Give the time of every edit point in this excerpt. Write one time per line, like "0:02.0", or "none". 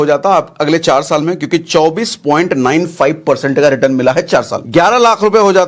0:04.6